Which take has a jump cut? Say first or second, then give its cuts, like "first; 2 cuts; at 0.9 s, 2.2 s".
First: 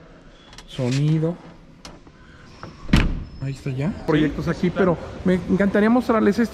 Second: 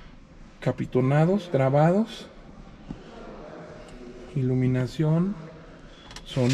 first; 1 cut; at 4.0 s